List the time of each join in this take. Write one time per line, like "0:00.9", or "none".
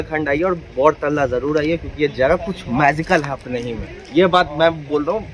none